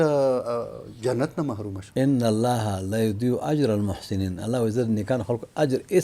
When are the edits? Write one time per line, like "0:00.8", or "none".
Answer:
0:01.8